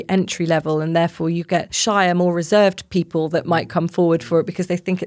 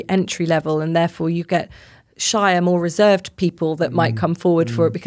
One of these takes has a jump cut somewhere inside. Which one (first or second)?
first